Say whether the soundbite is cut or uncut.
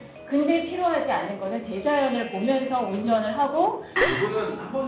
cut